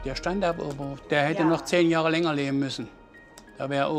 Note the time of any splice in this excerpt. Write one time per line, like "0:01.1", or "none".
0:00.9